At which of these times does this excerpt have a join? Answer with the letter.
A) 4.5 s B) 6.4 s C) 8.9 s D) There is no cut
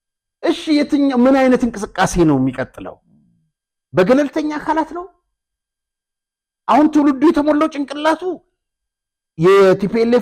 D